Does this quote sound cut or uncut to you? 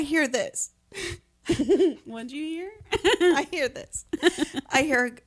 uncut